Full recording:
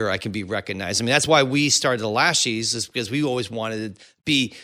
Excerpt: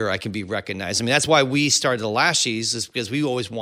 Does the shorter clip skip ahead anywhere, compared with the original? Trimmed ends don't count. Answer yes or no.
no